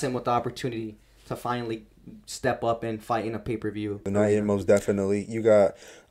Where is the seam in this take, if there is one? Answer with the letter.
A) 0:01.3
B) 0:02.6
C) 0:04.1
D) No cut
C